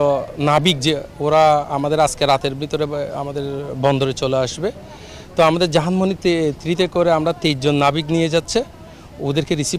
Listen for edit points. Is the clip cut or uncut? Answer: uncut